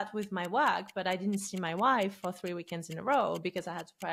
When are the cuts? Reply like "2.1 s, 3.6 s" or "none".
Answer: none